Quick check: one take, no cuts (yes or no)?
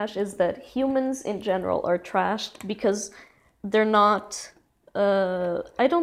yes